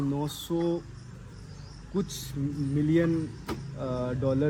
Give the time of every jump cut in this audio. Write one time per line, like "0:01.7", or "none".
none